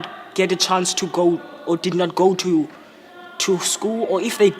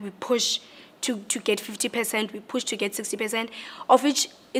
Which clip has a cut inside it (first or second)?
first